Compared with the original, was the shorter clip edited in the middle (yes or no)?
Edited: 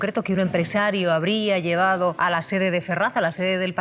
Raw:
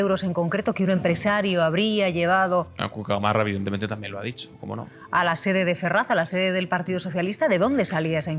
yes